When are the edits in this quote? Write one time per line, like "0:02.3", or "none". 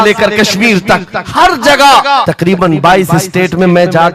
0:02.3